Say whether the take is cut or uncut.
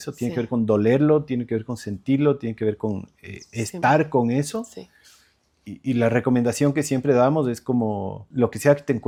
uncut